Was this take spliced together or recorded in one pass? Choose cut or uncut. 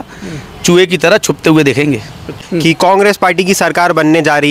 cut